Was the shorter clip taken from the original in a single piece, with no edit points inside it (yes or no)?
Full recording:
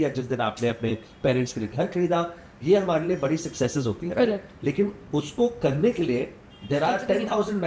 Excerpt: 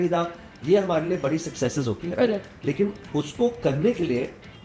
yes